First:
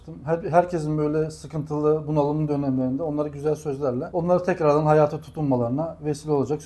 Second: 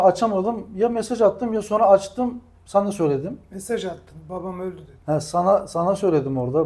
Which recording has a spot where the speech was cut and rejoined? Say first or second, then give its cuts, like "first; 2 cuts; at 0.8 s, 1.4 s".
first; 1 cut; at 4.1 s